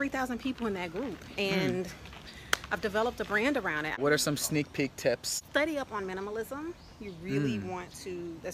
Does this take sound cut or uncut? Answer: cut